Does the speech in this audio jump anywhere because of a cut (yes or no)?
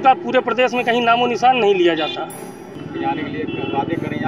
no